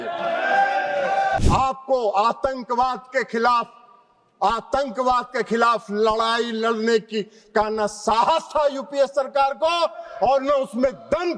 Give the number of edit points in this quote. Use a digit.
1